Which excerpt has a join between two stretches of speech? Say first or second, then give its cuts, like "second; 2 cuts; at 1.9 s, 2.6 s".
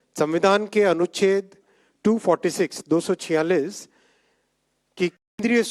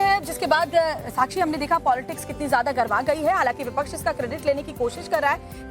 second; 1 cut; at 1.0 s